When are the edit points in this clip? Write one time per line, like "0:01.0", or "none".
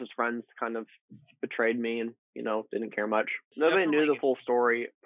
0:03.4